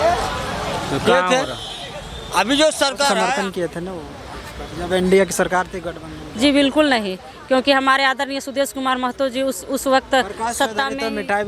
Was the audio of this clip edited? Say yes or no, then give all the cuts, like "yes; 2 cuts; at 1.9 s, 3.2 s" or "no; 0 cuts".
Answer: yes; 1 cut; at 3.4 s